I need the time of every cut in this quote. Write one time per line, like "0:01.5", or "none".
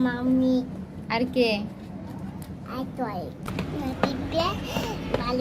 0:03.5